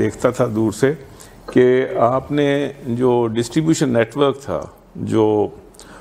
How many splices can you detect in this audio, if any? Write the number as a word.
zero